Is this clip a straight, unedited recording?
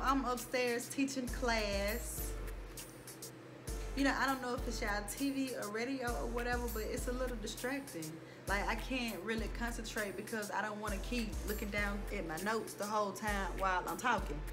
yes; 0 cuts

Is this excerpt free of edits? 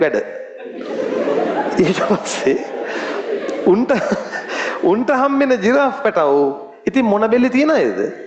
yes; 0 cuts

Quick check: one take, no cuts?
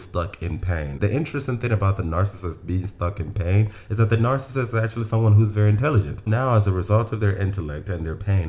no; 2 cuts; at 0.9 s, 6.3 s

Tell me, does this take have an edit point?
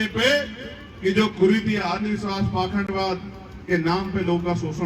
no; 0 cuts

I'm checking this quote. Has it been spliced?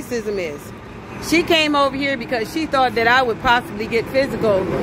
no; 0 cuts

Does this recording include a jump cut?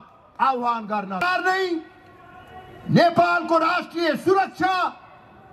yes; 1 cut; at 1.2 s

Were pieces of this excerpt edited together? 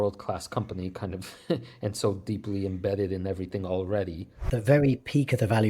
yes; 1 cut; at 4.4 s

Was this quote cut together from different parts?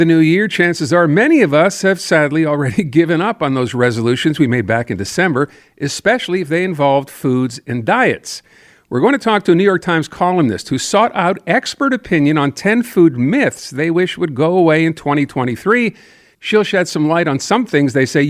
no; 0 cuts

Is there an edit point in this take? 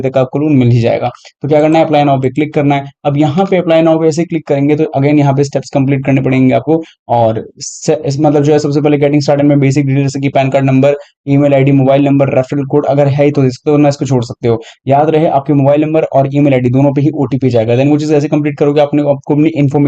no; 0 cuts

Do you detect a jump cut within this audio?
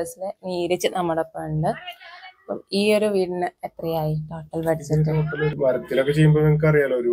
yes; 1 cut; at 5.5 s

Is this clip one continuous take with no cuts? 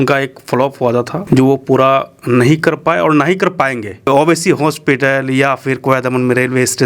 no; 2 cuts; at 1.2 s, 4.0 s

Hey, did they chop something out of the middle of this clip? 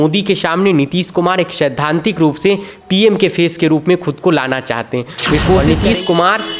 yes; 1 cut; at 5.6 s

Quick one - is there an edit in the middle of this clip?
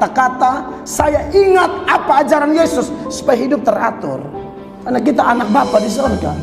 no; 0 cuts

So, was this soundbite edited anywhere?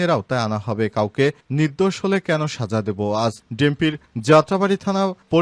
no; 0 cuts

